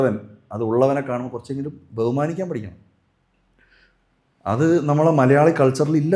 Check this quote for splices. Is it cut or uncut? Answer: uncut